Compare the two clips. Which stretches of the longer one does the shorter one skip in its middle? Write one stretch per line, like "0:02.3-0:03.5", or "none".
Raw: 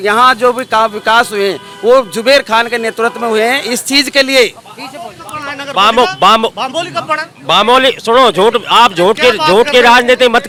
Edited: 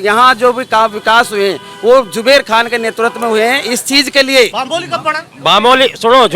0:04.6-0:06.6